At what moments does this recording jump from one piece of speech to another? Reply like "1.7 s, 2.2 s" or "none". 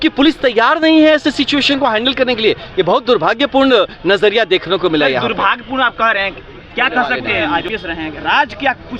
7.4 s